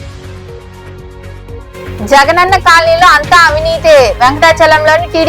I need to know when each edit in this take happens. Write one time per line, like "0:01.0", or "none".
none